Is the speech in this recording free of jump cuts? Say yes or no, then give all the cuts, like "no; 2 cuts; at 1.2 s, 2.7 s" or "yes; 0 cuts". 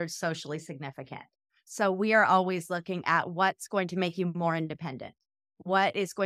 yes; 0 cuts